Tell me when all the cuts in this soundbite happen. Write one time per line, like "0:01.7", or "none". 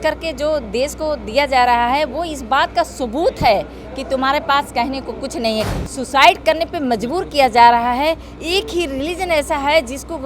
0:05.7